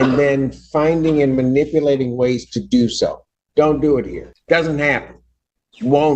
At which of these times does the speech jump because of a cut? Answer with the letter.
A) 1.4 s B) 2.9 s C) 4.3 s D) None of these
C